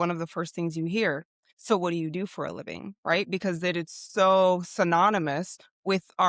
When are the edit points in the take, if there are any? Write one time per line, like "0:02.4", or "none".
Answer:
none